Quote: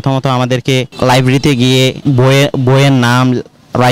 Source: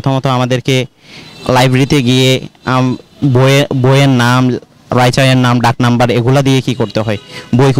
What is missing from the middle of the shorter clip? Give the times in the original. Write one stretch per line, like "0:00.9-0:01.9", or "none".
0:00.9-0:01.4
0:02.4-0:03.1

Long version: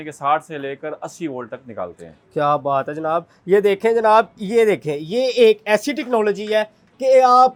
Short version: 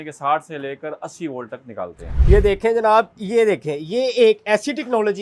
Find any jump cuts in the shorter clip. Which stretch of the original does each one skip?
0:02.1-0:03.3

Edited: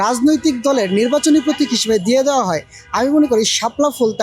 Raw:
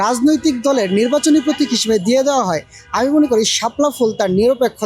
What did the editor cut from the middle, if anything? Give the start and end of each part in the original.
none

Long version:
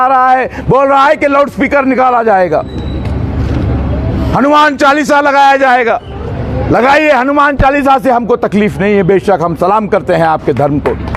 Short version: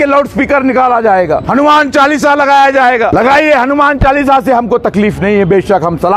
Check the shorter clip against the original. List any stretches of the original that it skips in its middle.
0:02.7-0:04.3
0:06.0-0:06.7

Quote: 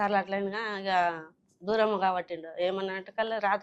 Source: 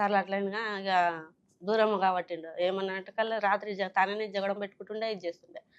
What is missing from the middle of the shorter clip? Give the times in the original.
none

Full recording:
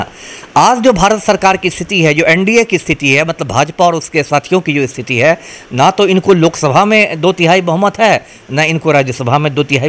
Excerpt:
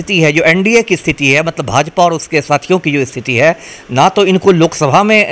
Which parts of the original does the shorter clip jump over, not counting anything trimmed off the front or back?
none

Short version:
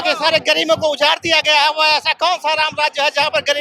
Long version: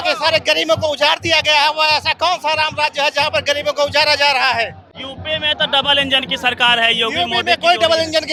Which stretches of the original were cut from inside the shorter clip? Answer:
none

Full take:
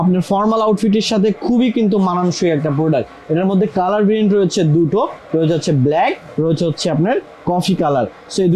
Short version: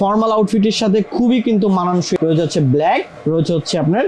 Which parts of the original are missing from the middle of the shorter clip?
0:02.5-0:05.3

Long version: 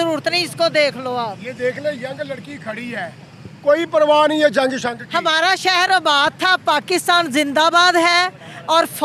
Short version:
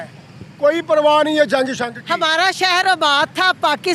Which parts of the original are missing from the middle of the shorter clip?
none

